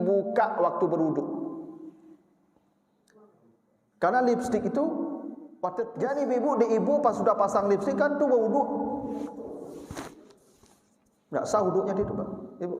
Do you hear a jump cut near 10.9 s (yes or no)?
no